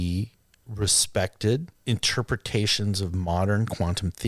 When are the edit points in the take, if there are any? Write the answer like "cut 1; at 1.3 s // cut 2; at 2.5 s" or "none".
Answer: cut 1; at 1.7 s